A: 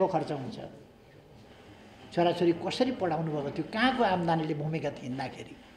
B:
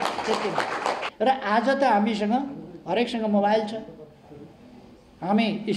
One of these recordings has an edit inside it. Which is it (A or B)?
B